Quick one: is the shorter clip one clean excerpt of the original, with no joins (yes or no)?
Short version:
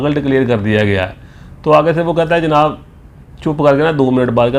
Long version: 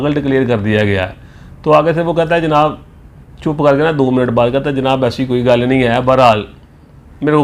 yes